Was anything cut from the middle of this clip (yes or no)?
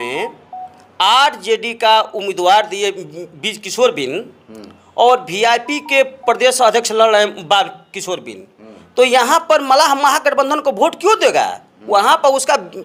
no